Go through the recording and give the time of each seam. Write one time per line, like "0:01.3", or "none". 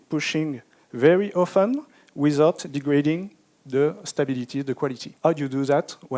0:05.0